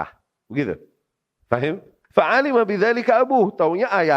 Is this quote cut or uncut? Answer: cut